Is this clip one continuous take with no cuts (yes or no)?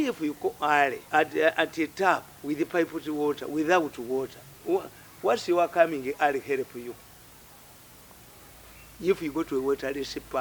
no